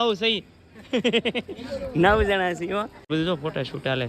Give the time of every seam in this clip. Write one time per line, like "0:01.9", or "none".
0:03.1